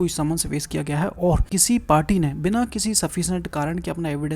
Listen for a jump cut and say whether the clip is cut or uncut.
cut